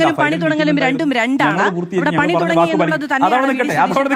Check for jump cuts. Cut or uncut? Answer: uncut